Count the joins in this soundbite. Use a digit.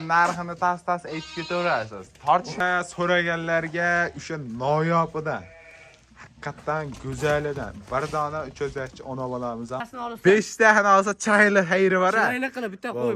2